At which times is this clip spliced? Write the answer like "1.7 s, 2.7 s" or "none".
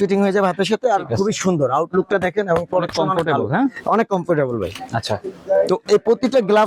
none

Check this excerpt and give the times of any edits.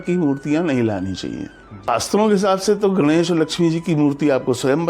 1.8 s

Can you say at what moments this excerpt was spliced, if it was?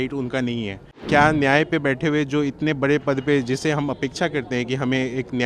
0.9 s

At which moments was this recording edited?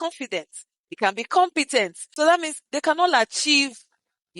2.0 s

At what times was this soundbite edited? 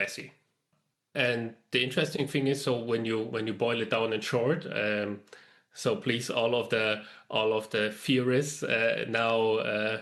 none

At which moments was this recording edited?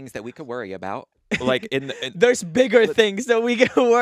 none

